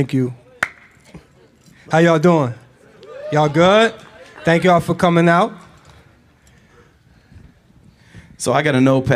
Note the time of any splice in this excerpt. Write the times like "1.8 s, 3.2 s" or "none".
1.8 s